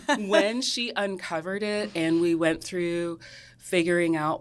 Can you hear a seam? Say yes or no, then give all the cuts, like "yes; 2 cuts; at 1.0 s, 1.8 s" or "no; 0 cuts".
no; 0 cuts